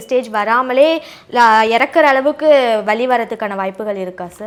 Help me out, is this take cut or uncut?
uncut